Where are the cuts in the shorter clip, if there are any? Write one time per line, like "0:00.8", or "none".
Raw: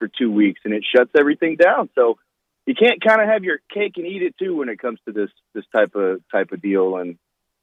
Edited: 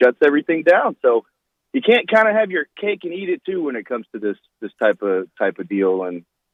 none